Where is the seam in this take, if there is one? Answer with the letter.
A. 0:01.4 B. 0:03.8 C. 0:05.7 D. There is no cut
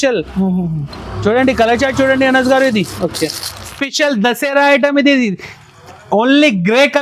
B